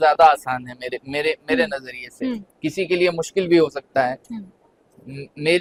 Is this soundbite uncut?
yes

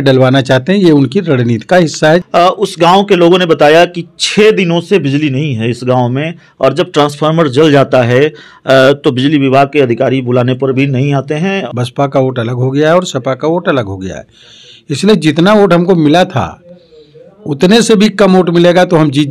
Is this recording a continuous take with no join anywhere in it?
no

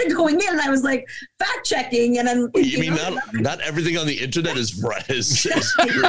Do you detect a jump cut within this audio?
no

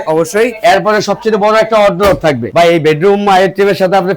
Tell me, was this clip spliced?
yes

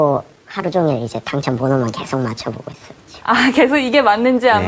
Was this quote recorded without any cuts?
yes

